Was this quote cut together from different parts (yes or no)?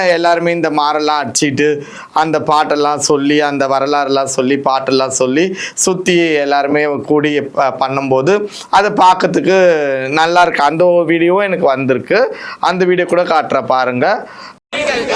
no